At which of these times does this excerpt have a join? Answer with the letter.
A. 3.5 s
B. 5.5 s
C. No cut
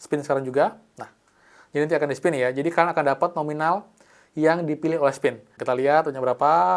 B